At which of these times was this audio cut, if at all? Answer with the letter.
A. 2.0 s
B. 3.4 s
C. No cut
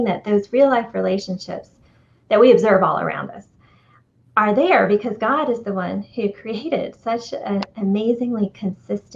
C